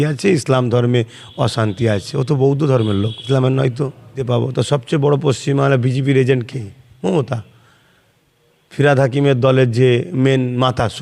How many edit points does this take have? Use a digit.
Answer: 2